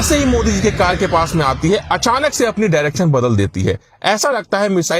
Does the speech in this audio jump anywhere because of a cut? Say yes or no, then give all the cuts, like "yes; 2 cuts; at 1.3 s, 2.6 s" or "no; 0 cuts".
no; 0 cuts